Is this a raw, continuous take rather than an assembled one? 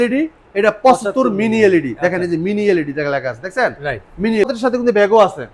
no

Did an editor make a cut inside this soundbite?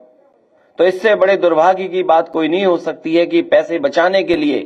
no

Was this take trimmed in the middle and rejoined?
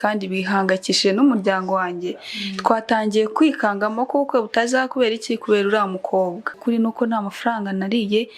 yes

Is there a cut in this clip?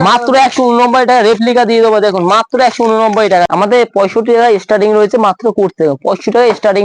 yes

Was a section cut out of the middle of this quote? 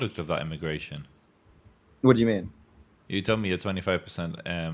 no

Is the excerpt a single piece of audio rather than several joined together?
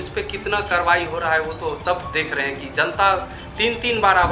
yes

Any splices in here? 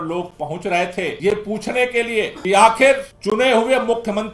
yes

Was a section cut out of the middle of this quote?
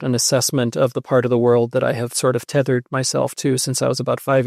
no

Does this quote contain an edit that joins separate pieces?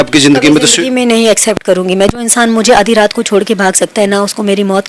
no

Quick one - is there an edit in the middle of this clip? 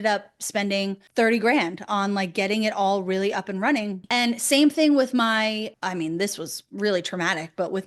yes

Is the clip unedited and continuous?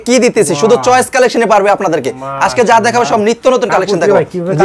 yes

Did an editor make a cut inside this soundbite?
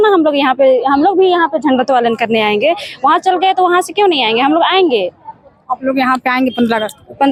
no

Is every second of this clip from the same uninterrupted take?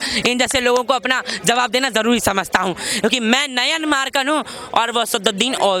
yes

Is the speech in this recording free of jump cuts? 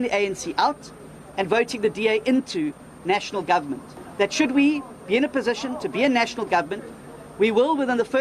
yes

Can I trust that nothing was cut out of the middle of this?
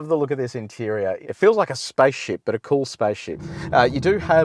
no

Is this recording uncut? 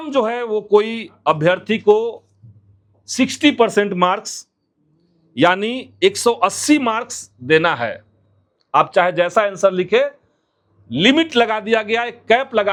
yes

